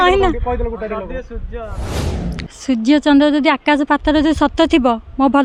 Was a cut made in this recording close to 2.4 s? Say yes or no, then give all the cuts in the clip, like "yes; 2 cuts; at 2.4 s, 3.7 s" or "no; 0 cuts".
no; 0 cuts